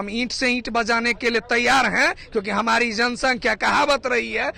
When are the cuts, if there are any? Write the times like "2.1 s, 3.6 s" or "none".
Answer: none